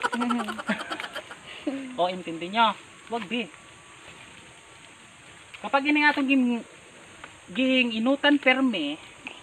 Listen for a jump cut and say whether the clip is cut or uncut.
uncut